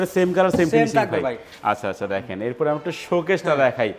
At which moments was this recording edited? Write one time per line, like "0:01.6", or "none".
none